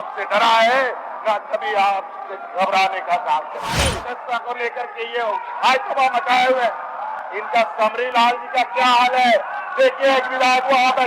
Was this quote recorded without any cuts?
no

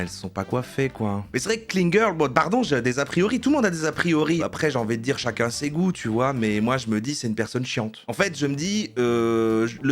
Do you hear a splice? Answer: yes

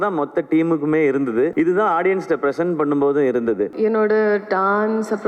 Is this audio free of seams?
no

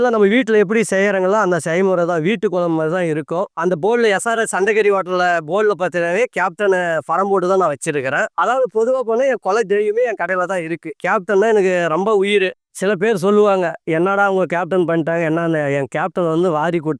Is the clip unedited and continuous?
no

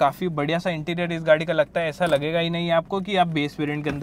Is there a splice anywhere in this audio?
no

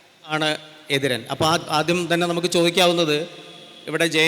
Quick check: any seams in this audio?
no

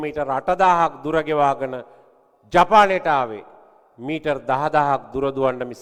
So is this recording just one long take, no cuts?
yes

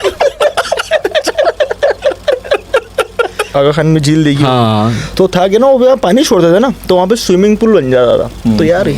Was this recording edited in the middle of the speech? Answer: yes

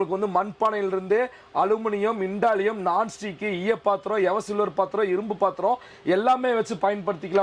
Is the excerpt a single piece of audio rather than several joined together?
yes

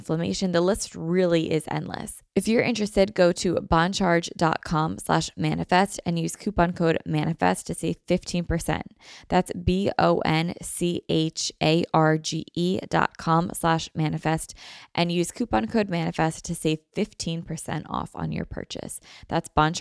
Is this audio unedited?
no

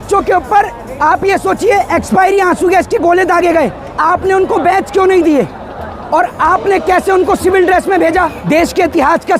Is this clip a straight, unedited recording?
no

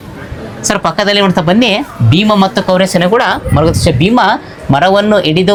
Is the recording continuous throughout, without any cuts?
yes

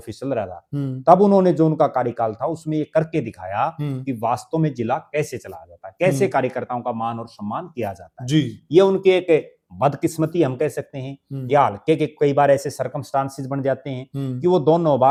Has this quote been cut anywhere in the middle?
no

